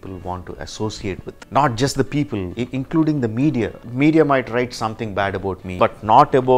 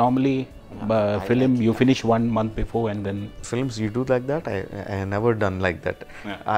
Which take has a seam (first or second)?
first